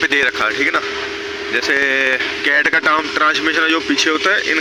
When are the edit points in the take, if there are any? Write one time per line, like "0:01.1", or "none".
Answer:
none